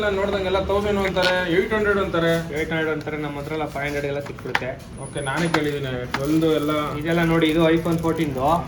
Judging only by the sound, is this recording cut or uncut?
uncut